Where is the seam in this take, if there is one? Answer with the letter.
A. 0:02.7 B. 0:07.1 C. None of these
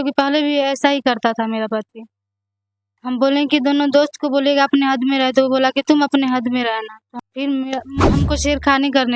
B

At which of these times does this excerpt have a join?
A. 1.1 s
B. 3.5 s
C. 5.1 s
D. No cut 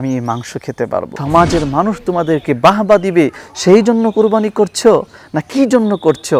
A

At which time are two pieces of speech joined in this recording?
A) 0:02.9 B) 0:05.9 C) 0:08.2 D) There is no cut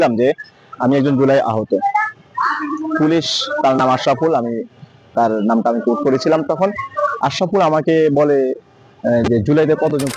D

